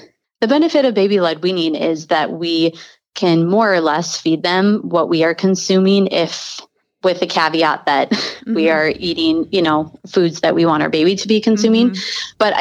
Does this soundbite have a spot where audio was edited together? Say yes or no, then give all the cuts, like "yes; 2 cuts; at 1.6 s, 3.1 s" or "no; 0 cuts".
no; 0 cuts